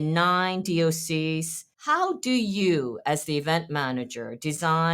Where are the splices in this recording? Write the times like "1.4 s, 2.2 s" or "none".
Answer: 1.7 s